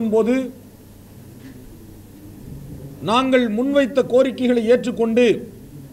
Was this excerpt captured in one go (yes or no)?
yes